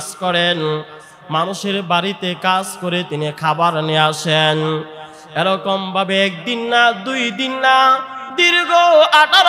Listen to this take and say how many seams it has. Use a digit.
0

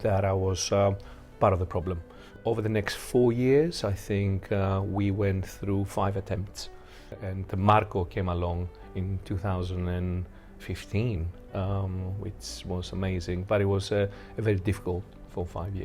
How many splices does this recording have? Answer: 2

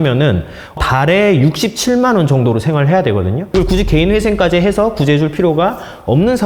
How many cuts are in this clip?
1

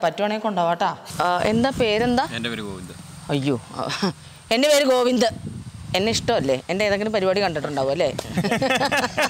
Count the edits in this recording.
1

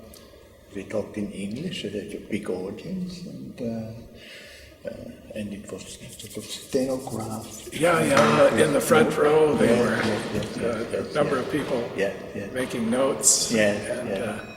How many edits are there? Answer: 1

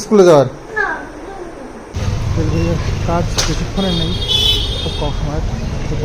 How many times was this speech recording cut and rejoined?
1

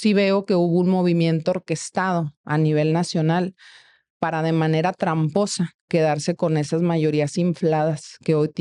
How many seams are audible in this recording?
0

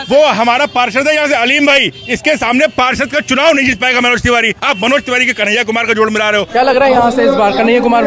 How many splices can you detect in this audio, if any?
1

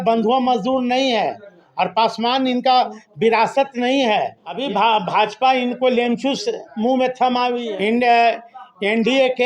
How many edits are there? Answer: 2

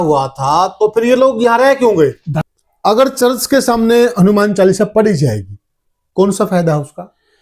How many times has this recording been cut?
1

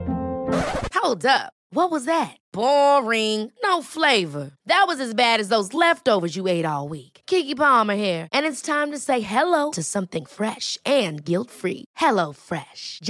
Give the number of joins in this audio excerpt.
0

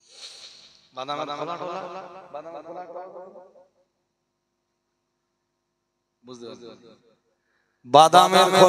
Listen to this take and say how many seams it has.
0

